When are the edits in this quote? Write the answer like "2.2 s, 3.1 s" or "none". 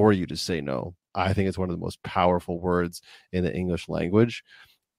0.9 s